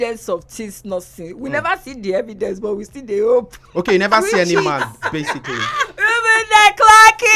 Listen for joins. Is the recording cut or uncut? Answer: uncut